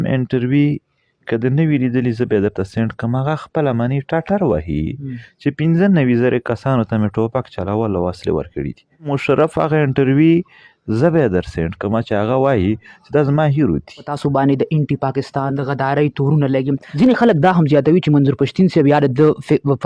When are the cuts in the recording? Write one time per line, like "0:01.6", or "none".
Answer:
0:09.2
0:14.1
0:15.5
0:16.9